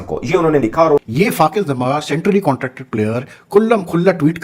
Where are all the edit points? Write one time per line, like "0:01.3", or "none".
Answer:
0:01.1